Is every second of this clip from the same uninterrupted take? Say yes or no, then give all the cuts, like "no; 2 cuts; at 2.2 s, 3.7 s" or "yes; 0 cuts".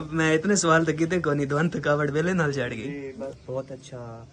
no; 1 cut; at 3.3 s